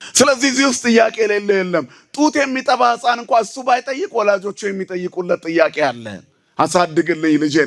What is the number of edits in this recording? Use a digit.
0